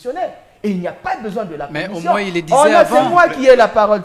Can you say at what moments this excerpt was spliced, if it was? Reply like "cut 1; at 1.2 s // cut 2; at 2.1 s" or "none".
none